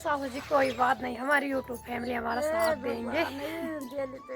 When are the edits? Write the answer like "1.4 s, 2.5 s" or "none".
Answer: none